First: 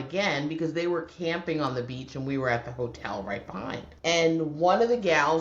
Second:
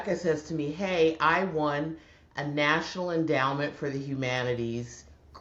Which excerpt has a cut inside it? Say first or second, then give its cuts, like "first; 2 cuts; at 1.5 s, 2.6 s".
first; 1 cut; at 3.9 s